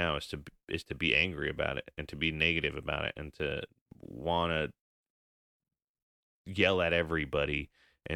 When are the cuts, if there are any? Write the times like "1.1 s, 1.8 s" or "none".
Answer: none